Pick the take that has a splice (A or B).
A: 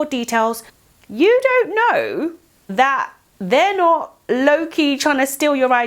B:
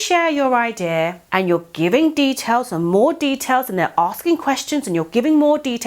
B